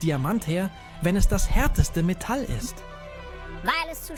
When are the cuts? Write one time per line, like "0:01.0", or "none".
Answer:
none